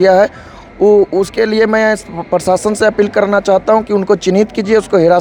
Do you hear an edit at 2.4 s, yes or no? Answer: no